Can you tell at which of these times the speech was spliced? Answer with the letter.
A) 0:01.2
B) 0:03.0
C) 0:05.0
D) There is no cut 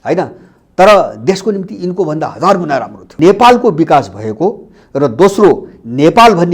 B